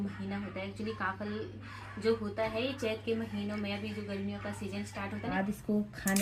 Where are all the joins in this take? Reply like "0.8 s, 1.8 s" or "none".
5.3 s